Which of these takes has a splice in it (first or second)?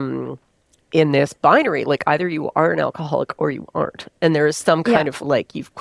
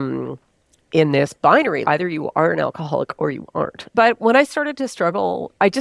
second